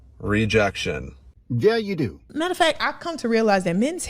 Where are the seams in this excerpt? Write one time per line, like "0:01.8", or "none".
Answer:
0:02.2